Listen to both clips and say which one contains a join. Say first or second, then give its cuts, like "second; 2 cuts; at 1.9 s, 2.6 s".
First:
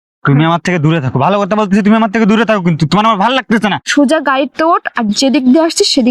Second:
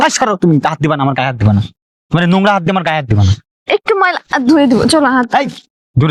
first; 1 cut; at 3.9 s